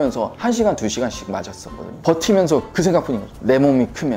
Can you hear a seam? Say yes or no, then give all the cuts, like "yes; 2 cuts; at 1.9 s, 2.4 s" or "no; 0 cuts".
yes; 1 cut; at 2.0 s